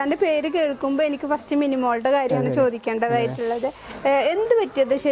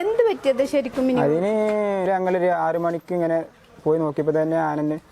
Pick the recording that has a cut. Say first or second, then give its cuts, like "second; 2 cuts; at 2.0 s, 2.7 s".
second; 1 cut; at 2.1 s